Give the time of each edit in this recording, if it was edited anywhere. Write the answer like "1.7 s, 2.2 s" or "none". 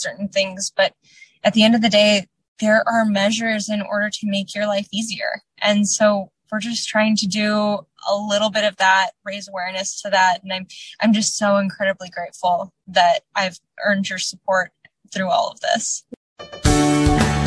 16.0 s